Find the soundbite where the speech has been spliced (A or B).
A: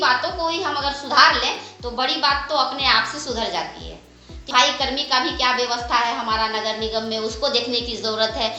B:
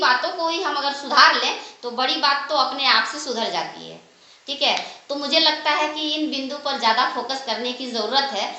A